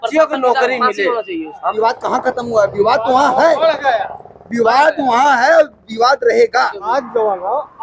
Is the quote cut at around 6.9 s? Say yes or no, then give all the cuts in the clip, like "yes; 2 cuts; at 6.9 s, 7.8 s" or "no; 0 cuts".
yes; 2 cuts; at 1.6 s, 6.9 s